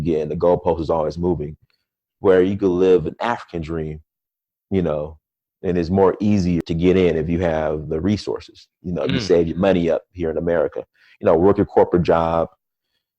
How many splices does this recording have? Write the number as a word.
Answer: one